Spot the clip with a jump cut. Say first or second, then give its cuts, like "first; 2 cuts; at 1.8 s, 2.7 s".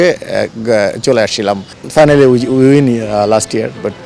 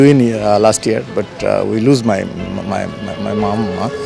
first; 1 cut; at 1.7 s